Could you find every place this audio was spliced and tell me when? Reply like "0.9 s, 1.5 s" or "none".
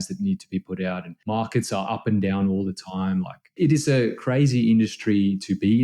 3.6 s